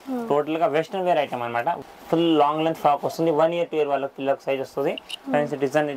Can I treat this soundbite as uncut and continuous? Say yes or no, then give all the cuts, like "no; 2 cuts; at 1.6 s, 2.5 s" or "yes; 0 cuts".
no; 1 cut; at 1.8 s